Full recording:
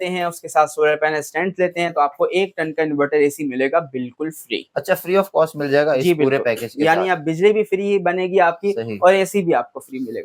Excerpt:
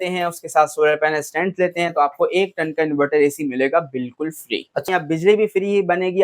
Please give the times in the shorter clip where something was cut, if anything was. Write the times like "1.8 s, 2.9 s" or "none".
4.9 s